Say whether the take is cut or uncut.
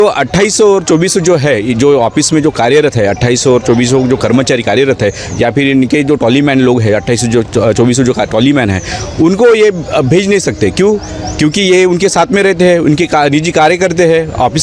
uncut